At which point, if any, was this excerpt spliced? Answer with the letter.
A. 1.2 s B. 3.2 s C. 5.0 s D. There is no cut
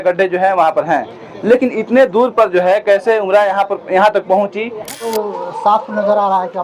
C